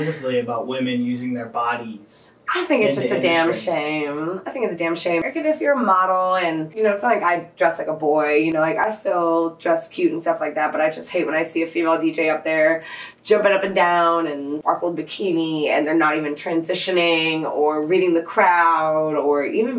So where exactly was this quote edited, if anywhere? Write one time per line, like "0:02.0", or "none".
0:05.2
0:06.7
0:14.6